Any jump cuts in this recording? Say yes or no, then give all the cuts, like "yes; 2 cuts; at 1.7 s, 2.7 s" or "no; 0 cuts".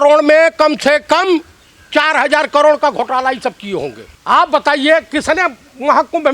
yes; 1 cut; at 4.1 s